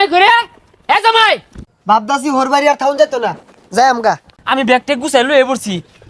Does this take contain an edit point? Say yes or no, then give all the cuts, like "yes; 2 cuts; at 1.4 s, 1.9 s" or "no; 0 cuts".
yes; 2 cuts; at 1.6 s, 4.3 s